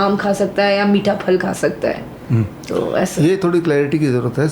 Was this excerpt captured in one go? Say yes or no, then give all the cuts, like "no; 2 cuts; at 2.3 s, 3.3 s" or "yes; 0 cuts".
yes; 0 cuts